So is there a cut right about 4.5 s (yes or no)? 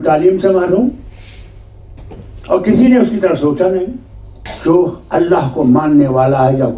yes